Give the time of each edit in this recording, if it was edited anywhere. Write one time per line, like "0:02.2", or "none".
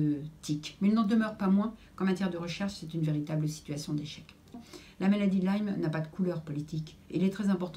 0:04.6